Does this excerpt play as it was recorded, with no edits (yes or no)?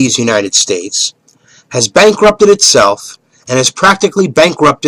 yes